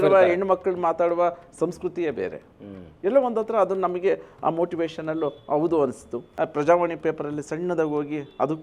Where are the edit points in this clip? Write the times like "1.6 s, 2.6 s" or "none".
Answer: 6.2 s